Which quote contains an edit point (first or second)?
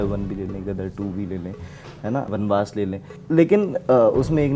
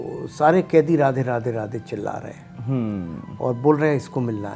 first